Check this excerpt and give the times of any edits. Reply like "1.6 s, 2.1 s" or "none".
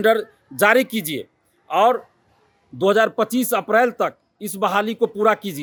none

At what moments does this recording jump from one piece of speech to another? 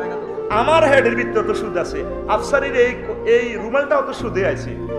none

